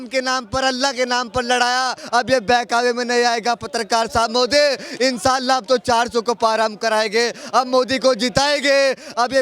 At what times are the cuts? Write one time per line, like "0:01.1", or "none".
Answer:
0:02.0